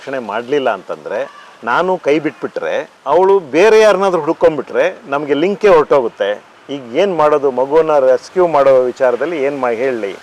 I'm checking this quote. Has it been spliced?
no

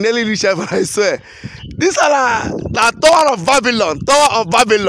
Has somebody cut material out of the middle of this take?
no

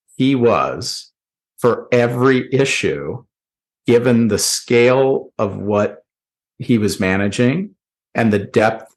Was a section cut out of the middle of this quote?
no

